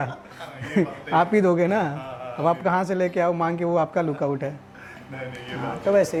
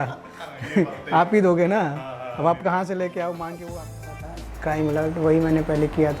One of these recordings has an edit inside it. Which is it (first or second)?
second